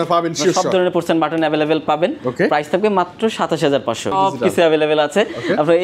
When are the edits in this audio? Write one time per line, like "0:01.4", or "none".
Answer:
0:04.1